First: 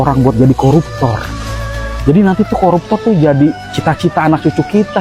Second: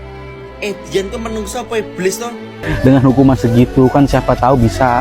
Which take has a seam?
second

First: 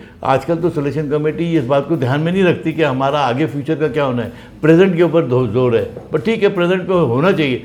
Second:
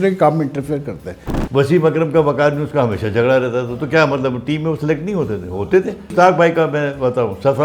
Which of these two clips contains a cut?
second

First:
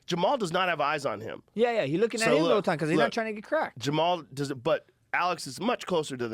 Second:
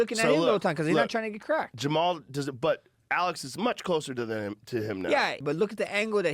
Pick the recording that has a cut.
second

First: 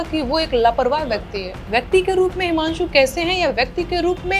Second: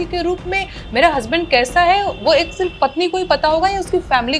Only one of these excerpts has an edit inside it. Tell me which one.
first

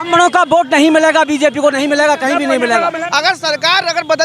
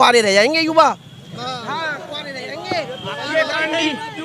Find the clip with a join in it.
first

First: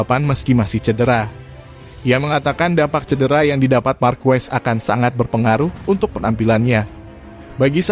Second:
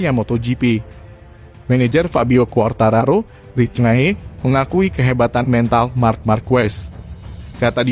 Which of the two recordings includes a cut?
second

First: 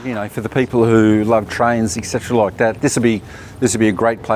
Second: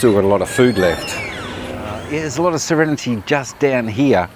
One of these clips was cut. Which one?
second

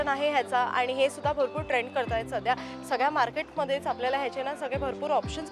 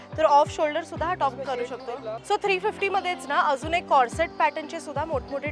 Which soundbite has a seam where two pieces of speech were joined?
second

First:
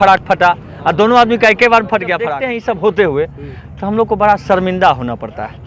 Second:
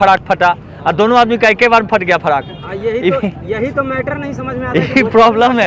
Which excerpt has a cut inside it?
first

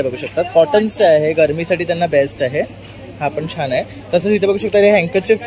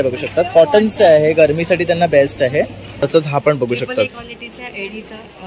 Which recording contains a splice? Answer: second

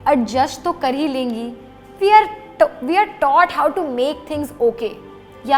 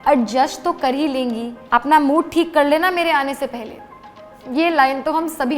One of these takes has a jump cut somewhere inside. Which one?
second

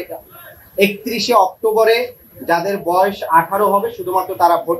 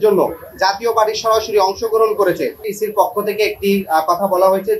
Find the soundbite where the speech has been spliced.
second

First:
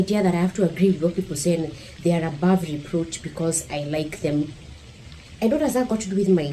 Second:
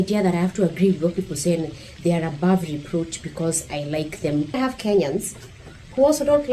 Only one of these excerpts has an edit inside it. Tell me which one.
second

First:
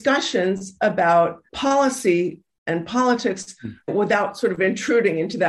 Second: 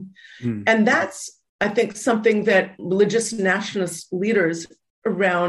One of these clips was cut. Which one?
first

